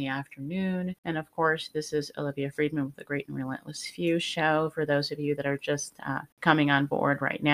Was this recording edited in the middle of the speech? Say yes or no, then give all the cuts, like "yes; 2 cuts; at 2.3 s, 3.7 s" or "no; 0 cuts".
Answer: yes; 2 cuts; at 1.0 s, 6.3 s